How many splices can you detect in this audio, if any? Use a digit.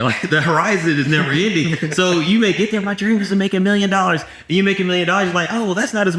0